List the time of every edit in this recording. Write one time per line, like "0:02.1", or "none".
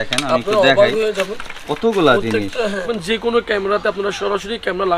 0:02.9

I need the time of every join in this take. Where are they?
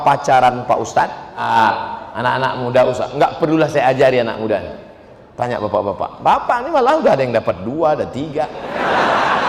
0:01.4

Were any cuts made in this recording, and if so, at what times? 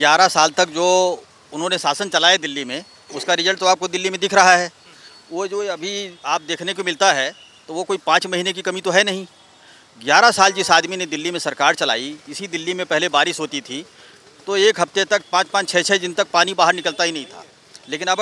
none

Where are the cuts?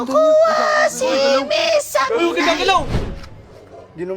none

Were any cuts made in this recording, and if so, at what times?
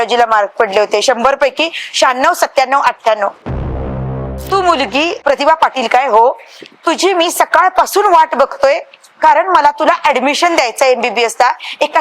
0:03.8
0:05.2

